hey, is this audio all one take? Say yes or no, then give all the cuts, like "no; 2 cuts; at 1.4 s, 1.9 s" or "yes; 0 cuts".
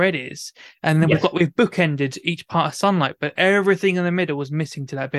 yes; 0 cuts